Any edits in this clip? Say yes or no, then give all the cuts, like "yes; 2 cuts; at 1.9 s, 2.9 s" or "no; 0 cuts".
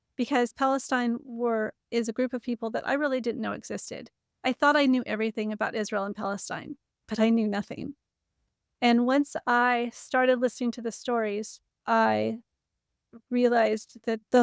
no; 0 cuts